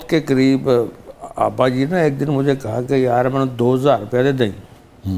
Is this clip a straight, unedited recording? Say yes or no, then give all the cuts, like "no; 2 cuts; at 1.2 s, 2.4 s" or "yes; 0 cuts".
yes; 0 cuts